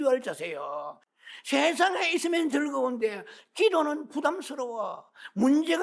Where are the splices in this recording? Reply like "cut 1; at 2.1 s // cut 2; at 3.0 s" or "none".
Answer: cut 1; at 1.0 s